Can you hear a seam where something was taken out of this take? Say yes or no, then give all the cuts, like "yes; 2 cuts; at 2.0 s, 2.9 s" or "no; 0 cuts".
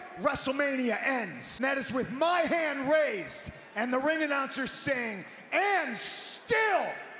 yes; 1 cut; at 1.4 s